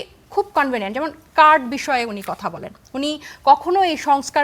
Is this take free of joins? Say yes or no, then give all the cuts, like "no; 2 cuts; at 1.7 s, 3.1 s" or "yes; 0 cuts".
yes; 0 cuts